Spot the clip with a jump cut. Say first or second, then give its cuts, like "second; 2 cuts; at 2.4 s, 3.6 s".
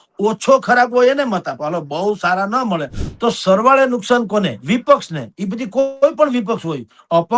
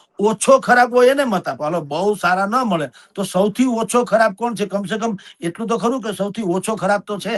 first; 1 cut; at 3.0 s